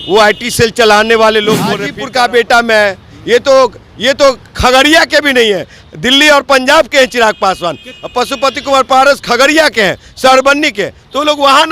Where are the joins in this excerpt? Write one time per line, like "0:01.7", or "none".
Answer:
0:01.9